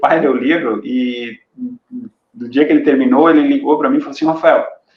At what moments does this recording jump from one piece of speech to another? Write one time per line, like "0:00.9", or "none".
none